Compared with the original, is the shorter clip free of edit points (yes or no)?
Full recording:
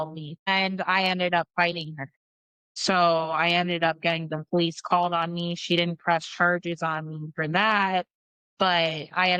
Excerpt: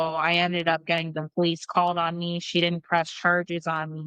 yes